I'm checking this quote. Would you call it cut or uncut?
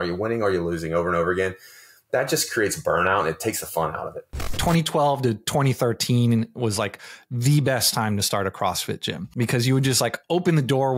cut